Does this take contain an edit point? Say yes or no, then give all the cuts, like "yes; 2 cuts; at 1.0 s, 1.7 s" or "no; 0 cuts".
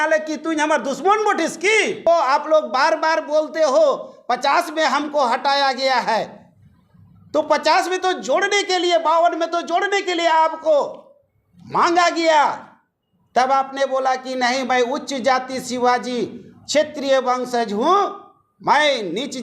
yes; 1 cut; at 2.1 s